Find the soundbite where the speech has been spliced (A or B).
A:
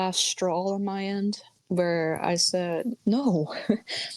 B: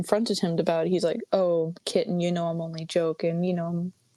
A